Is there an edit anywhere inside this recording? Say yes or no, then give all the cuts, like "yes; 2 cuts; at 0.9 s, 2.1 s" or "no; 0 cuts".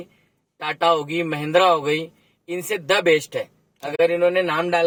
no; 0 cuts